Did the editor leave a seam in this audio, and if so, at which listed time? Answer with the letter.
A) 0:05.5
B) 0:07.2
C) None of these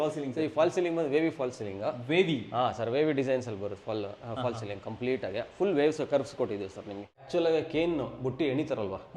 B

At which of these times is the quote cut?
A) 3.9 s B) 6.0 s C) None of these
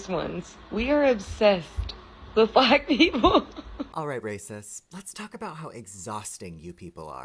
A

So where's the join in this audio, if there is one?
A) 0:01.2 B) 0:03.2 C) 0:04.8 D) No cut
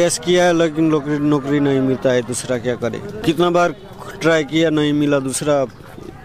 B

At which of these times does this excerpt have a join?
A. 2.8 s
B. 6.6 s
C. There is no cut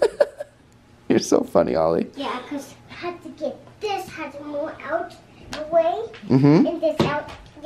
A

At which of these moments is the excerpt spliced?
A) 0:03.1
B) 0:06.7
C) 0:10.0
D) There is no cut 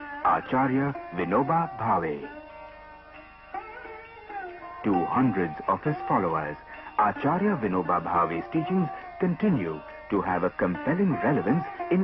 A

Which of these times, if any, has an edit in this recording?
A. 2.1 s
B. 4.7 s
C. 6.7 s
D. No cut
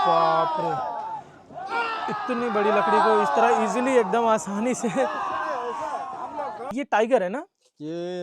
C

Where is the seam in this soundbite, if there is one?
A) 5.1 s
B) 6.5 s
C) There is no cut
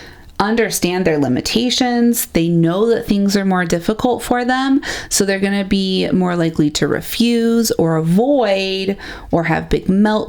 C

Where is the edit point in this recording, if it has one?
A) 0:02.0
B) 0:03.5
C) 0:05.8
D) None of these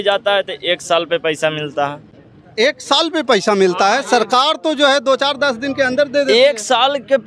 D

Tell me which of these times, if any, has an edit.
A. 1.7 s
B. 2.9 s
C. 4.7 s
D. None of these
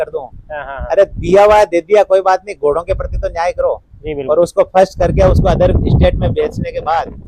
D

